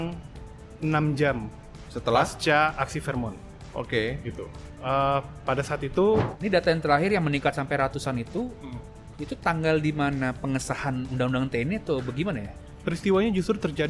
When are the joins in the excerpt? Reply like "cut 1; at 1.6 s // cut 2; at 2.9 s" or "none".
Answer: cut 1; at 6.3 s